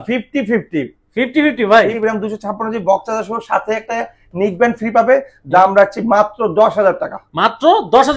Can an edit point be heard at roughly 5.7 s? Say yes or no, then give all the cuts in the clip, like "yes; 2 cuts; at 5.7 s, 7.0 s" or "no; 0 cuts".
no; 1 cut; at 2.0 s